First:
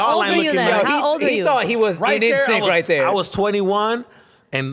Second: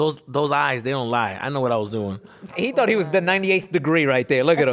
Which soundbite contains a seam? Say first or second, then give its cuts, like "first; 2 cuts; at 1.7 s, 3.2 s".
second; 1 cut; at 2.5 s